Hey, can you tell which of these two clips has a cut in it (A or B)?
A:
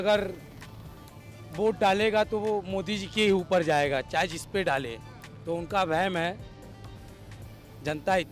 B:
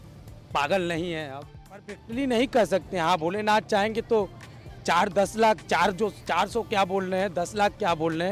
B